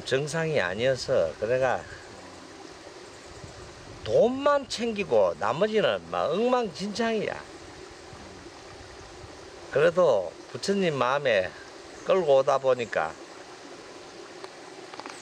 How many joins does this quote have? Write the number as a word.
zero